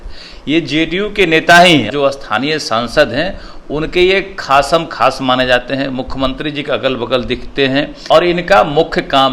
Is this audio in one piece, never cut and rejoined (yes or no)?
no